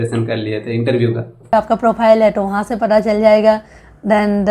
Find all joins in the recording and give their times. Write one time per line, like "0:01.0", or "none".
0:01.5